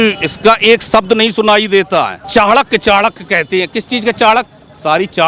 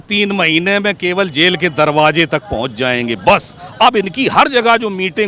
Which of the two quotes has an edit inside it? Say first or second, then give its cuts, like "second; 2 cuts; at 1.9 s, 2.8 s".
first; 1 cut; at 2.2 s